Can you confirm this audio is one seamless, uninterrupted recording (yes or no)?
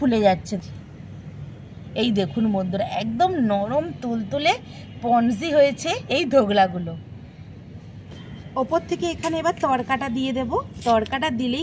yes